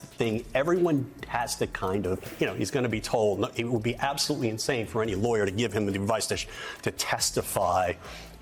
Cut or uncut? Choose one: uncut